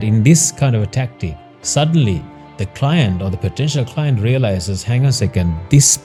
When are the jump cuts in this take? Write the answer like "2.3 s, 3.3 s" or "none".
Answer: none